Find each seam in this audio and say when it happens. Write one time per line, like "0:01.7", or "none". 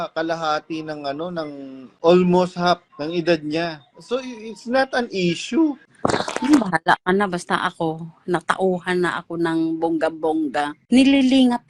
0:01.9
0:02.9
0:05.9
0:10.8